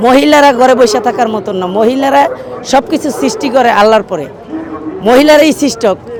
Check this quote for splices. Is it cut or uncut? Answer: uncut